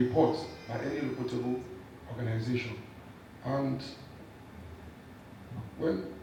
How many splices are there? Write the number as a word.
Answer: zero